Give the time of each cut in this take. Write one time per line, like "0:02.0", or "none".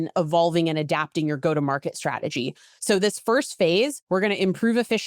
0:04.0

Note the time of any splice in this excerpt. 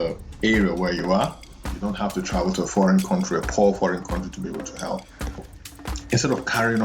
0:05.4

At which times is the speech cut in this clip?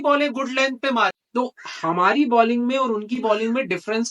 0:01.2

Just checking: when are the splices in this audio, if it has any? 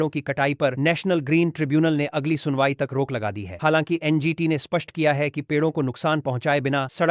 none

